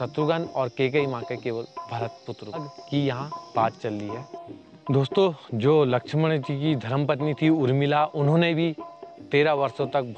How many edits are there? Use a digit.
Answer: 1